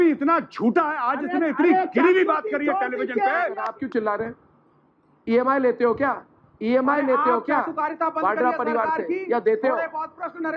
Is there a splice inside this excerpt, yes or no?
yes